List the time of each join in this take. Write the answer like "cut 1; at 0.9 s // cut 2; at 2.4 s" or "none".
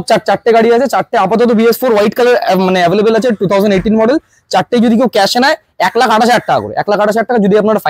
none